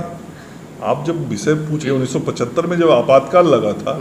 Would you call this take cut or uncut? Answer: cut